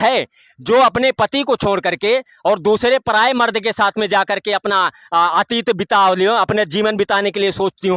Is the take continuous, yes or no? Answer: yes